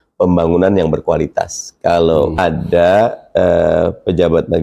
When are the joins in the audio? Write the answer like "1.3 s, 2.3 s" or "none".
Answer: 2.4 s